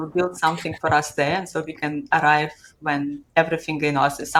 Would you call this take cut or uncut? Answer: uncut